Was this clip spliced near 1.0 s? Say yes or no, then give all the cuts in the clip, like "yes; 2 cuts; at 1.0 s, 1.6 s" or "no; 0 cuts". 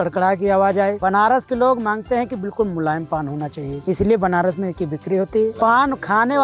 yes; 3 cuts; at 1.0 s, 3.7 s, 5.5 s